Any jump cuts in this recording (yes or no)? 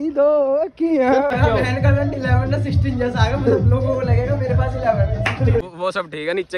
yes